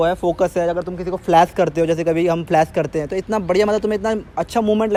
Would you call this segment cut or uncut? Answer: uncut